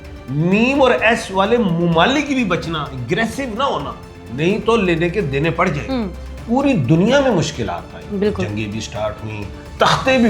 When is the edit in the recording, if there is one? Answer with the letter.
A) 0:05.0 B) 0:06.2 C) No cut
B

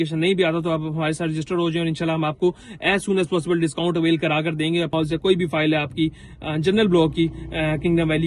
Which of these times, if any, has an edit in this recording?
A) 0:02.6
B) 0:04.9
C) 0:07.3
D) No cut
B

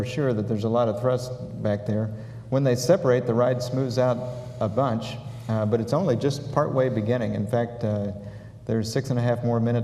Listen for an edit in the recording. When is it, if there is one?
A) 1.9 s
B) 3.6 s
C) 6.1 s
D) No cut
D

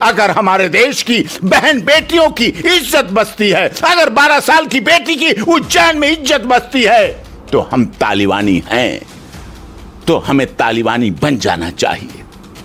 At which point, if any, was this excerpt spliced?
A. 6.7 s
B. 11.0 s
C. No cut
C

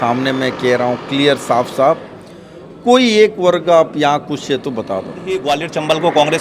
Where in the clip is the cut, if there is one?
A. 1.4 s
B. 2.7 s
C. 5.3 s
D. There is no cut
C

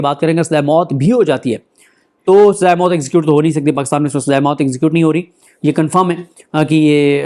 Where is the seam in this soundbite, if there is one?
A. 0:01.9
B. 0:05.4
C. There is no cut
B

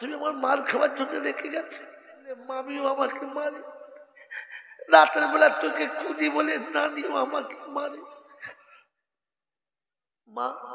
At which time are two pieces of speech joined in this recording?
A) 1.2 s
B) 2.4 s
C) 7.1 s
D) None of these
B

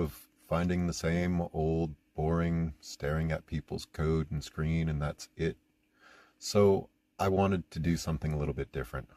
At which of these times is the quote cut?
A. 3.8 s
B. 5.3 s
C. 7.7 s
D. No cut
D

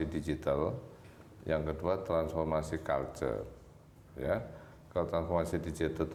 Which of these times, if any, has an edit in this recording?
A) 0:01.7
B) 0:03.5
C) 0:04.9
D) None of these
D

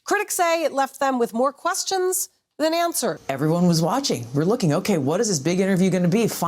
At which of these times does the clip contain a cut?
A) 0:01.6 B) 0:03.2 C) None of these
B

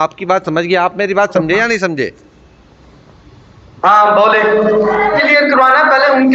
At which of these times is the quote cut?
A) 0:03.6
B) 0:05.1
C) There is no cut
B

